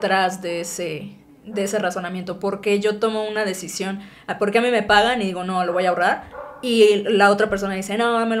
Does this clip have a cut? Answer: no; 0 cuts

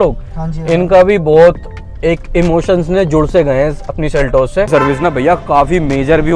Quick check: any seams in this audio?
yes; 1 cut; at 4.7 s

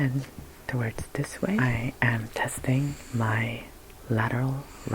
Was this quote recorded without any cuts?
no; 2 cuts; at 1.6 s, 3.0 s

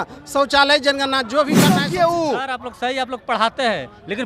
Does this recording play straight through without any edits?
no; 1 cut; at 1.7 s

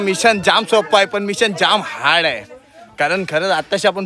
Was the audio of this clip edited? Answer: no; 0 cuts

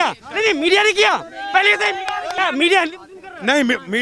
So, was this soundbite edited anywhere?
no; 0 cuts

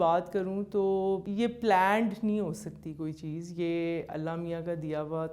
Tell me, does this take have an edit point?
yes; 1 cut; at 1.3 s

